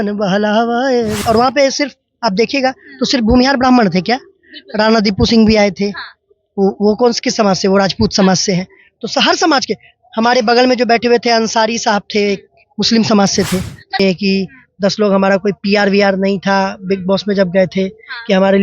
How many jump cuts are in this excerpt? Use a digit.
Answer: 2